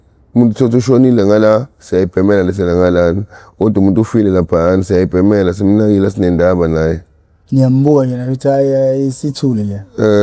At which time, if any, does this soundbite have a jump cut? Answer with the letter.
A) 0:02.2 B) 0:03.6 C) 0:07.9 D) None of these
D